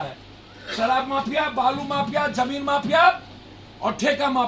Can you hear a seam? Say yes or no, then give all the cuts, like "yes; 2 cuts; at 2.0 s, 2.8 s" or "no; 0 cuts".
no; 0 cuts